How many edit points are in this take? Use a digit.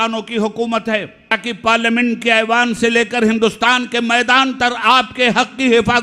1